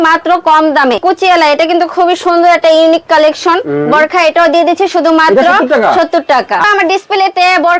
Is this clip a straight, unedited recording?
no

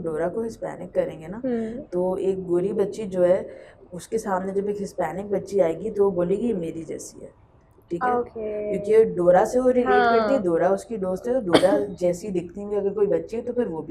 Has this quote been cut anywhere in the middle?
no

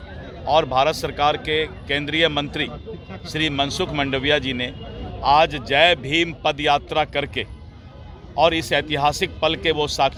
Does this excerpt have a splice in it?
no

